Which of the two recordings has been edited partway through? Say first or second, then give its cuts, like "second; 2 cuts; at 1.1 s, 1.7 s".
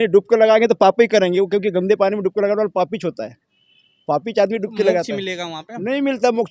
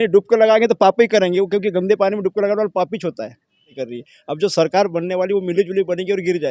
second; 1 cut; at 3.8 s